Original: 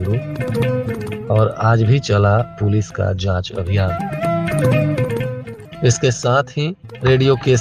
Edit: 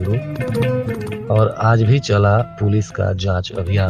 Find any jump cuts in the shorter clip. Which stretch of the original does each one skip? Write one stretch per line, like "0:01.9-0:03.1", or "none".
none